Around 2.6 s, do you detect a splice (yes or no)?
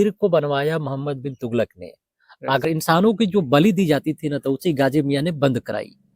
yes